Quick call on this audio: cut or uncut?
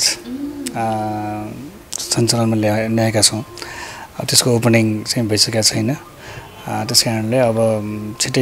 uncut